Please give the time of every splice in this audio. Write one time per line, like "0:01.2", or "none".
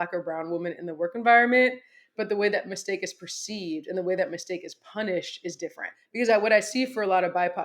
0:05.9